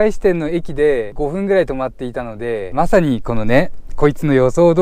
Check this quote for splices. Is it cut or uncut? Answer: cut